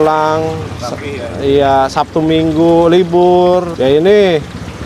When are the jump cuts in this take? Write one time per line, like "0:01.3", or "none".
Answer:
0:03.7